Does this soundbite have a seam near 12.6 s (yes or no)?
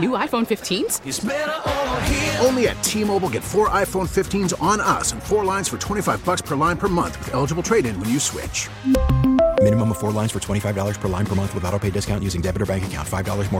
no